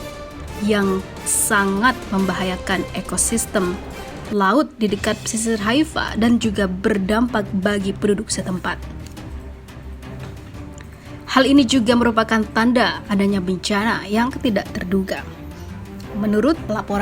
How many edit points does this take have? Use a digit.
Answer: 2